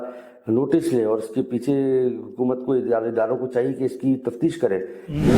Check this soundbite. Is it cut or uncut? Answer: uncut